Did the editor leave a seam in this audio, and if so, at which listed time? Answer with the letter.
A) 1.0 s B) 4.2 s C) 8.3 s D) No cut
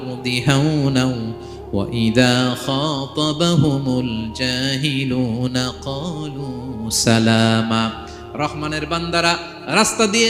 D